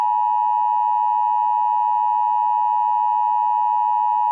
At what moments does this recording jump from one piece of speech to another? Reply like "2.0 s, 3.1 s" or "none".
none